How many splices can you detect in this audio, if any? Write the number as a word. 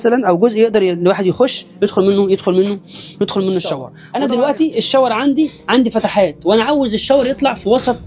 one